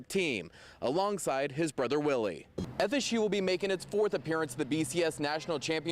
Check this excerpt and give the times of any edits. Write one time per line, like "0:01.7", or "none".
0:02.6